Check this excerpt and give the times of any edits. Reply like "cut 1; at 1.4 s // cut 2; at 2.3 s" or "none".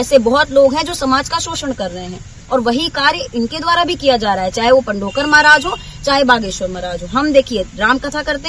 none